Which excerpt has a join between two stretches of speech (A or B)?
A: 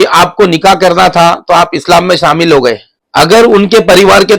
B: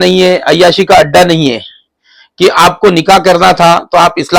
A